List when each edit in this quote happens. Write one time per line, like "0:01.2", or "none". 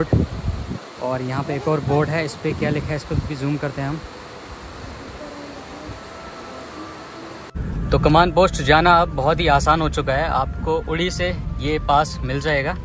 0:07.5

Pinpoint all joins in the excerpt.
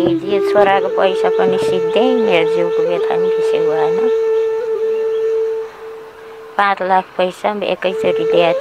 none

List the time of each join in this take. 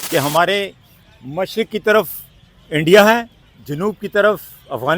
0:03.4

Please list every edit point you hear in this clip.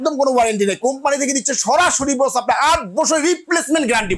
none

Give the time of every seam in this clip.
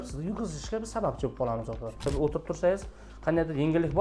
0:02.0

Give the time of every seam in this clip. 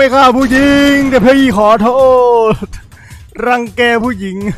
none

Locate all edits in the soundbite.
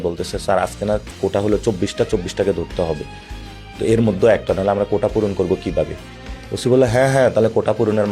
none

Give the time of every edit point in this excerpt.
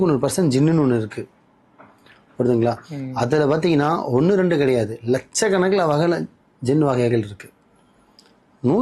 none

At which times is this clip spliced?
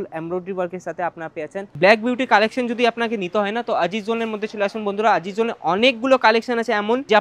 0:01.6

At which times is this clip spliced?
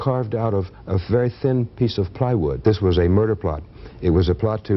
0:02.6

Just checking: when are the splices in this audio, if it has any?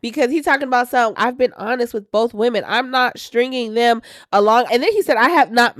0:01.1
0:04.7

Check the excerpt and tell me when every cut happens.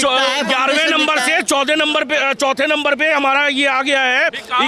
none

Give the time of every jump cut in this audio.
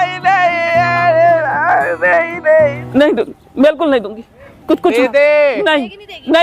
0:02.8

